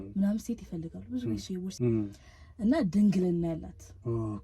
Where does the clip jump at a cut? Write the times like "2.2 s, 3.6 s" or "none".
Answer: 1.7 s